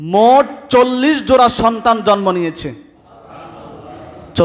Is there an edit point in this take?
no; 0 cuts

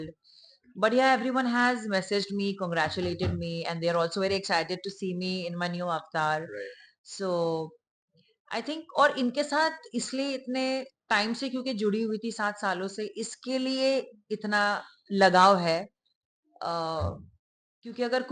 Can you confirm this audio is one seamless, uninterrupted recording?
yes; 0 cuts

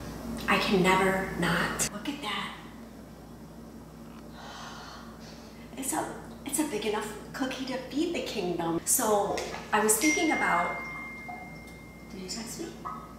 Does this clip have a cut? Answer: yes; 2 cuts; at 1.9 s, 8.8 s

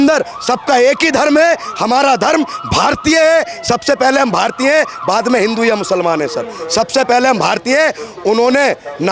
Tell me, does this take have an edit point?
no; 0 cuts

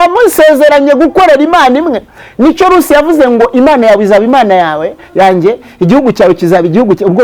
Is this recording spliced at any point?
no; 0 cuts

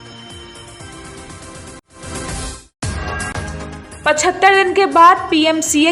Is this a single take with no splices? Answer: no; 1 cut; at 2.5 s

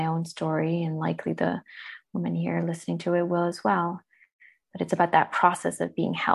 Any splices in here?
no; 0 cuts

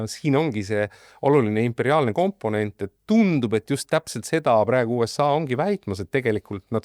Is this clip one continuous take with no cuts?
yes; 0 cuts

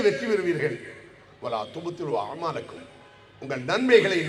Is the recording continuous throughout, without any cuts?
yes; 0 cuts

